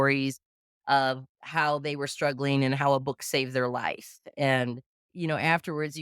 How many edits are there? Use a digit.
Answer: 1